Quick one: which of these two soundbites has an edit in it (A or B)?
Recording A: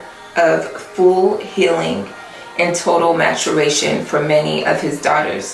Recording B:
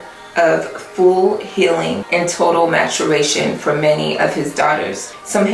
B